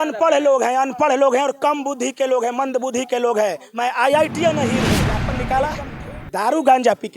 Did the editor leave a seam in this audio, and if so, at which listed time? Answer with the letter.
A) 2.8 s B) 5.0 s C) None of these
B